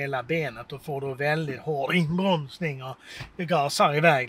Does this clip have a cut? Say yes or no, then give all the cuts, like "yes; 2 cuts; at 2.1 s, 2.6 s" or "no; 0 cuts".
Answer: no; 0 cuts